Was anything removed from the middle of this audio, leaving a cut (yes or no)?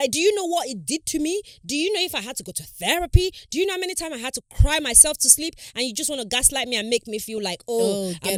no